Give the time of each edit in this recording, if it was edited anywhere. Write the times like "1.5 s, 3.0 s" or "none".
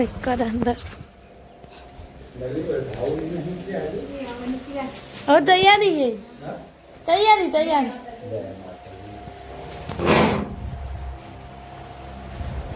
none